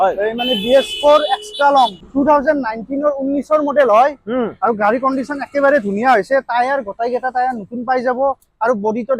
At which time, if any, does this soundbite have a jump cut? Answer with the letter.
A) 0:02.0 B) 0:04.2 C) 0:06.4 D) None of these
A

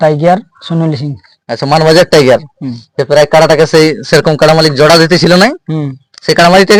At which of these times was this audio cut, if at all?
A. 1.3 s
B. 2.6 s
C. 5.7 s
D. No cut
D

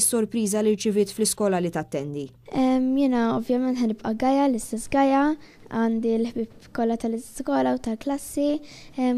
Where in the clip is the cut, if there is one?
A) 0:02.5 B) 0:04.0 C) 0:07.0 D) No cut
D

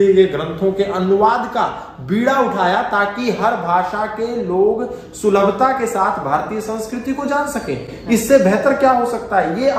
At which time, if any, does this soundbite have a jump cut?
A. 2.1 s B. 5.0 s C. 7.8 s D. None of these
D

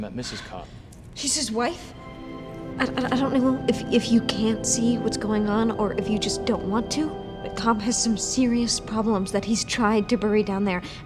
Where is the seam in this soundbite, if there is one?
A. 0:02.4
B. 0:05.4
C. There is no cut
A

